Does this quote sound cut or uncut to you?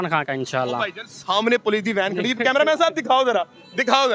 uncut